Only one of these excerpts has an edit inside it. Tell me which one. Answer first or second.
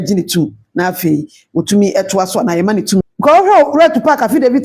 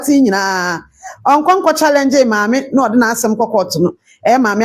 first